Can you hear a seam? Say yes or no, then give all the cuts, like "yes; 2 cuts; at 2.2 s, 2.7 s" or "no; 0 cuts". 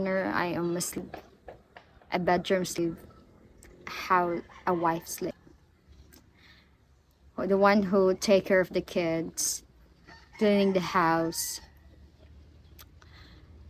yes; 3 cuts; at 1.0 s, 2.8 s, 5.3 s